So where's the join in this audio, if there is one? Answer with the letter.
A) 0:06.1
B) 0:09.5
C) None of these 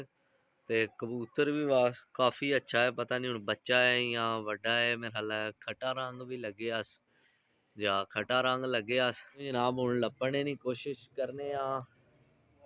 B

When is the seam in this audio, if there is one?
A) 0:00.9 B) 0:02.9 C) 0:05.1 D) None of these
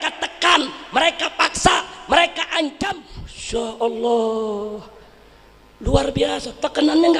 B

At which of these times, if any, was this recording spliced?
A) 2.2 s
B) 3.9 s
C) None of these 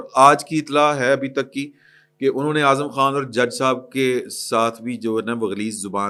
C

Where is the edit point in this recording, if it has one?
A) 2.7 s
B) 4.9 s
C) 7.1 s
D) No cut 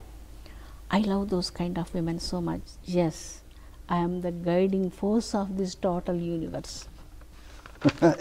A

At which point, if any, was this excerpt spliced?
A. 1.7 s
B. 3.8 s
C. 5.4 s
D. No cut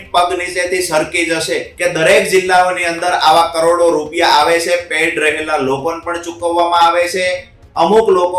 A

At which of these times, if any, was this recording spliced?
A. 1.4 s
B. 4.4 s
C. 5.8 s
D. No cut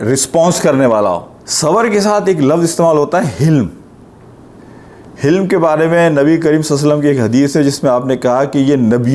A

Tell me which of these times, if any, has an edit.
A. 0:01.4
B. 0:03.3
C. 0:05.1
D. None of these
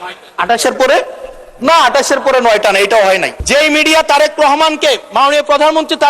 B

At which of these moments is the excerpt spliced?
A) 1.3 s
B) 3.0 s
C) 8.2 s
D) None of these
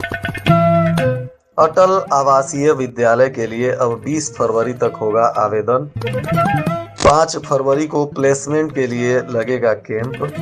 A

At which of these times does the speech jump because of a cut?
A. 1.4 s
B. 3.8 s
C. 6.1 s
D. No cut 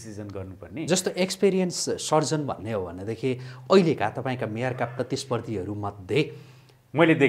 D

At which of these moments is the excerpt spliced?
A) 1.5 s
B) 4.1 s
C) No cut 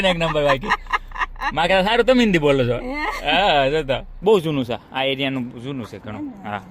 B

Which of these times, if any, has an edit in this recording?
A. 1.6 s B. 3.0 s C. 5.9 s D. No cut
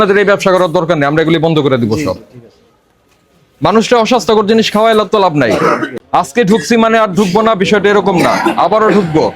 C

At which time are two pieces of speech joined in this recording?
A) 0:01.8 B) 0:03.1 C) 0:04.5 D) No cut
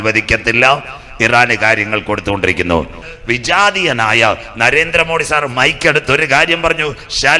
B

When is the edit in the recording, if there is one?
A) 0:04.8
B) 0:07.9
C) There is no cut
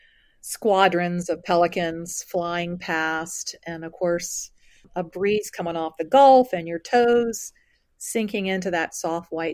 A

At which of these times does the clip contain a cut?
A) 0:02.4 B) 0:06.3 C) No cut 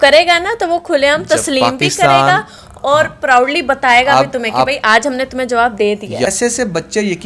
B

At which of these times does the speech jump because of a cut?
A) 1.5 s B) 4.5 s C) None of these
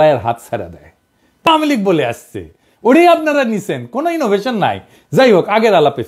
A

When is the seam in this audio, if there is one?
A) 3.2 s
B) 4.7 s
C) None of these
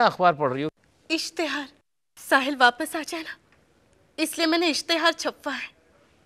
C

